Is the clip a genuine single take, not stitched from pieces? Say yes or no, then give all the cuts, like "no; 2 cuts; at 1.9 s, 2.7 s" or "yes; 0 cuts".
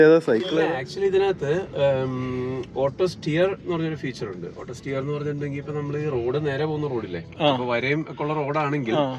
no; 1 cut; at 0.9 s